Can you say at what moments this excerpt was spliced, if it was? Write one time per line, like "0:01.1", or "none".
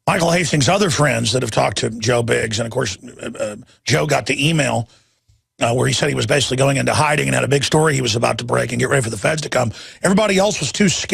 0:09.9